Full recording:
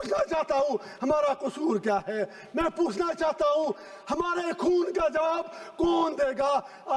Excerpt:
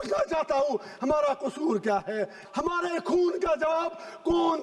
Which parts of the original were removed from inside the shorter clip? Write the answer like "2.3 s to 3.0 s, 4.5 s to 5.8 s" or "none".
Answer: 2.4 s to 3.9 s